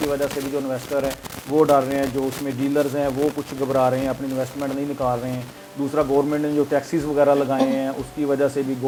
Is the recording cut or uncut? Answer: uncut